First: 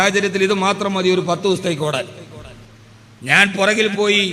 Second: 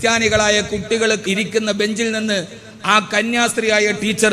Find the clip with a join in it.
second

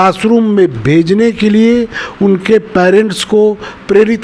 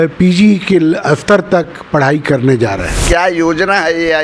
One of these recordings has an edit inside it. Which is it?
second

